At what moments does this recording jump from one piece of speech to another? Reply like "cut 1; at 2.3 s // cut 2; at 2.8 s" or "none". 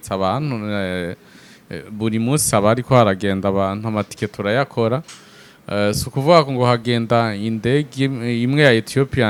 none